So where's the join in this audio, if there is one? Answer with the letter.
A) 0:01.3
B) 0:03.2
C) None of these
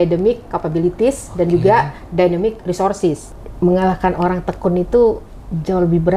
B